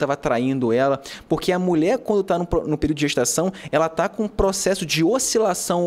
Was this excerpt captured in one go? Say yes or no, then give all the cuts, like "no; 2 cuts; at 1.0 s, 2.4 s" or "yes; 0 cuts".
yes; 0 cuts